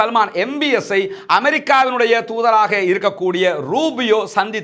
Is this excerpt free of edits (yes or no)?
yes